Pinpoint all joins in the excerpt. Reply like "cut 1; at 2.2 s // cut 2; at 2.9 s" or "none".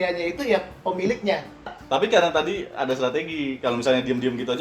cut 1; at 1.8 s